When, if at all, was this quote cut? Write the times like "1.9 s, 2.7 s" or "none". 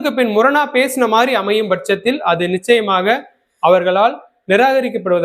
none